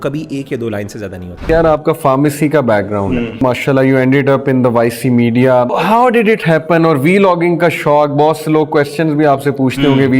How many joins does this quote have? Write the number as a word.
three